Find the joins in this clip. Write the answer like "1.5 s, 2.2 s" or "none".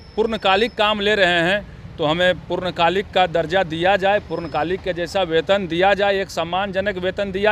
none